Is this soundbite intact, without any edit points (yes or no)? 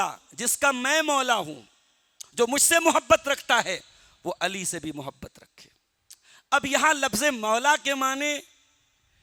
yes